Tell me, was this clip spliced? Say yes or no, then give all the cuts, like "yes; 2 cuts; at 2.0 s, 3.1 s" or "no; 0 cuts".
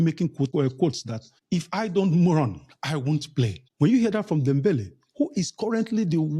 no; 0 cuts